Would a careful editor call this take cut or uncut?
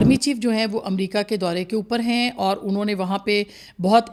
uncut